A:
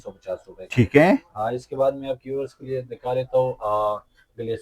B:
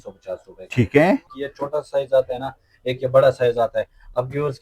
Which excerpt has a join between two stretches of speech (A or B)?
B